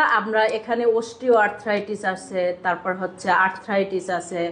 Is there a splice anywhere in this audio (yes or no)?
no